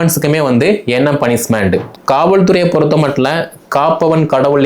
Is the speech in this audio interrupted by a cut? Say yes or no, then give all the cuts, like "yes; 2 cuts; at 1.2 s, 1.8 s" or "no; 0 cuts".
yes; 1 cut; at 1.9 s